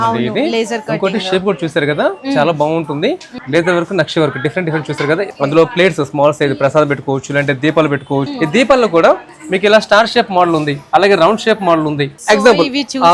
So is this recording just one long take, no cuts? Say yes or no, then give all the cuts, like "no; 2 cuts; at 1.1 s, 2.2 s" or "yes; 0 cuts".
no; 4 cuts; at 3.3 s, 5.3 s, 8.3 s, 12.1 s